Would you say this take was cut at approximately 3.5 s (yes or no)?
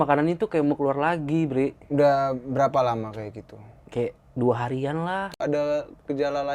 no